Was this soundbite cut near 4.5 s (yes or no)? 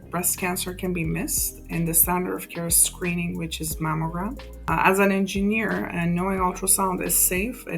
yes